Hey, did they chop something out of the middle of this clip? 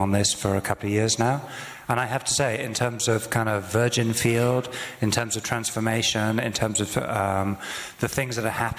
no; 0 cuts

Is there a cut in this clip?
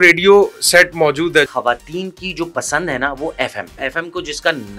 yes; 2 cuts; at 1.5 s, 3.8 s

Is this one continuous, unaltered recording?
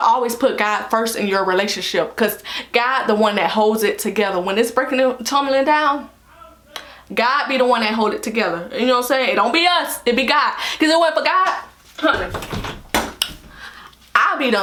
yes; 0 cuts

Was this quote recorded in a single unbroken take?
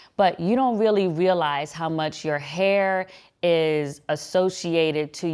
yes; 0 cuts

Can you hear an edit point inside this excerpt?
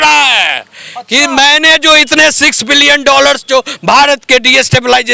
no; 0 cuts

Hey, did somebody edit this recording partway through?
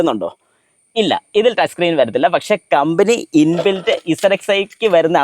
no; 0 cuts

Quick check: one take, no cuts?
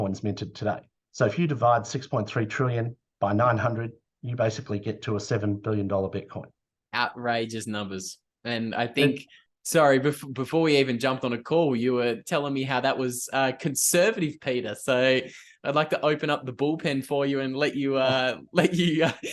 yes; 0 cuts

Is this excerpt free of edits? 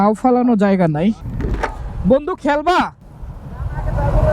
no; 1 cut; at 1.3 s

